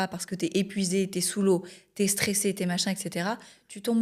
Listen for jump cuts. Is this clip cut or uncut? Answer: uncut